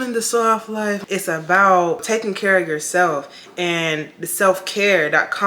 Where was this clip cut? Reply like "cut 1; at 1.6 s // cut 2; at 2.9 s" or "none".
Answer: cut 1; at 1.0 s // cut 2; at 2.0 s